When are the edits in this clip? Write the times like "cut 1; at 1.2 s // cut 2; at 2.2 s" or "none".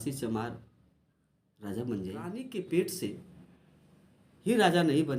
cut 1; at 2.4 s